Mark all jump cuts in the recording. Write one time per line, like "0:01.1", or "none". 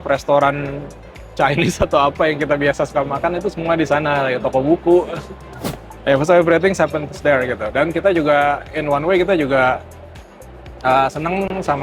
none